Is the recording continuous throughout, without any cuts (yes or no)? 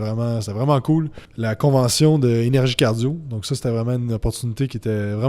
no